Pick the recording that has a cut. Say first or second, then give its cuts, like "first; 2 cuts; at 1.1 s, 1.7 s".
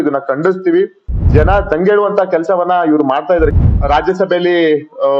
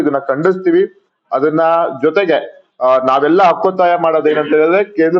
second; 1 cut; at 1.0 s